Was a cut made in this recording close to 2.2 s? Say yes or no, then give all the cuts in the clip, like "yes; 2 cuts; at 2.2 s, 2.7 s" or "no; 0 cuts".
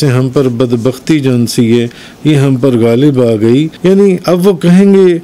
no; 1 cut; at 3.7 s